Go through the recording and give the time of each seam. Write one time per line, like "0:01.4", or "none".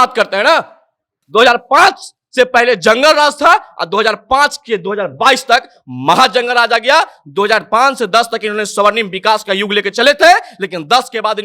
0:01.2